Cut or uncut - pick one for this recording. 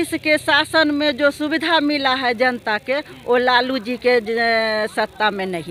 uncut